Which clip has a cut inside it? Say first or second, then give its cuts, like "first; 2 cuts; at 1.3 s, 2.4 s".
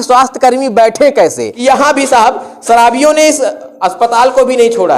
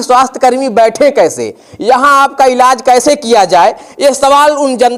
first; 1 cut; at 1.5 s